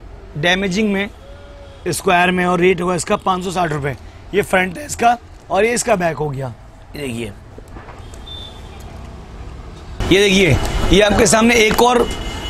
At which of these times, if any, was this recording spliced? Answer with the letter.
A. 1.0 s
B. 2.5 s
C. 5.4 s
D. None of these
D